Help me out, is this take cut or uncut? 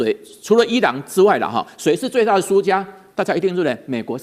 uncut